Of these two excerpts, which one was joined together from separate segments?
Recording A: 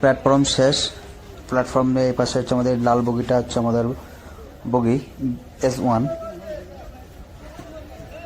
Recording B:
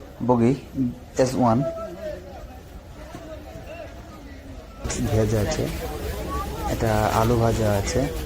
B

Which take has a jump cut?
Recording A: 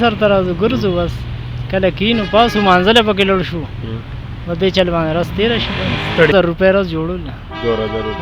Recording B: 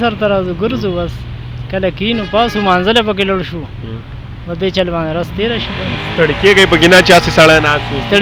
A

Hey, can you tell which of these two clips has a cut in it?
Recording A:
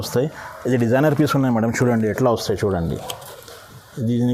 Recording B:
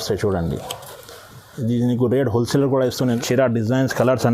B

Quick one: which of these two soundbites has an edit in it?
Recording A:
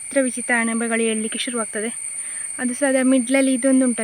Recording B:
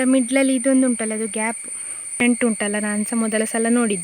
B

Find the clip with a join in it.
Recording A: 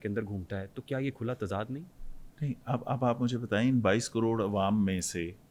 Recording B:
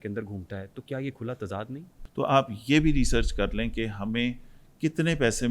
B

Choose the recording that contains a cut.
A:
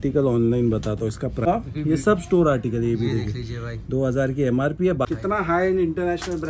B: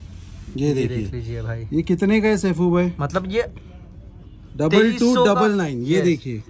A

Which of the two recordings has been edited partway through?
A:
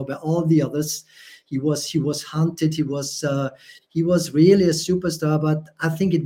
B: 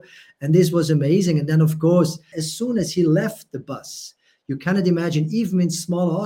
B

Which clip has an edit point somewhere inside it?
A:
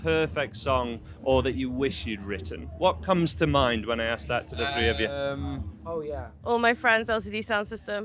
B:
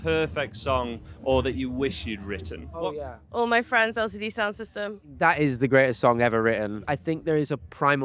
B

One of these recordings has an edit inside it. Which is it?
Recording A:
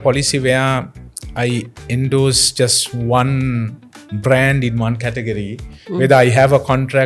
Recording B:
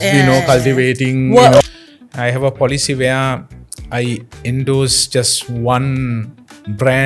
B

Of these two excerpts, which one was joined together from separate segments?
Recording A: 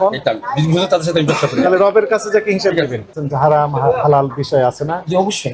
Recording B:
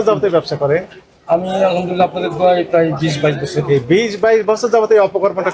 A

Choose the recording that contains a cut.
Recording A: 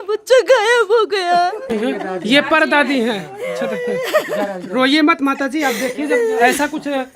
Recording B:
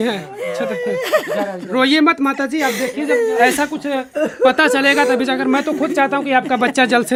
A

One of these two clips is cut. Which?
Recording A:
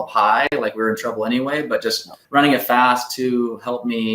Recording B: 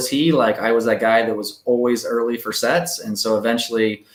A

